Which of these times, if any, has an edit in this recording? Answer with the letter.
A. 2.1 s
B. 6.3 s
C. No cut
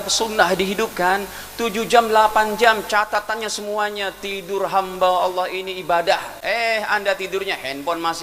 B